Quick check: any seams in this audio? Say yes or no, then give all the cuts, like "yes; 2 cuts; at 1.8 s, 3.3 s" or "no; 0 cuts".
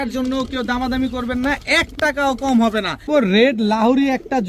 yes; 1 cut; at 3.1 s